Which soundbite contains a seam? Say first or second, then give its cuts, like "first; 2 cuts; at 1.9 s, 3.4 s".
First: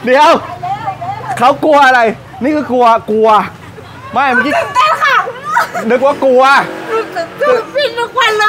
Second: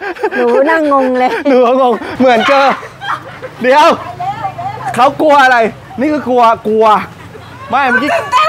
second; 1 cut; at 2.1 s